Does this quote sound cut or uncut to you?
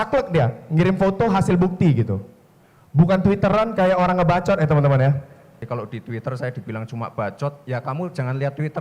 cut